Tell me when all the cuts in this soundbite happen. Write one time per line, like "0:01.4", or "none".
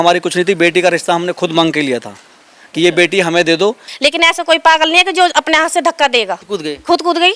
0:03.9
0:06.4